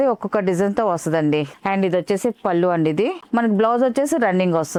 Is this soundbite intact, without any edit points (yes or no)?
yes